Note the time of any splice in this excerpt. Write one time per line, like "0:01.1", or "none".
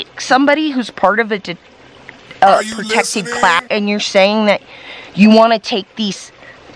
0:03.6